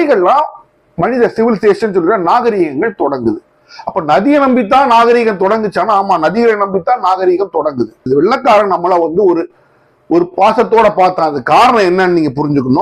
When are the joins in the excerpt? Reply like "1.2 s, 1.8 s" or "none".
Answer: 8.1 s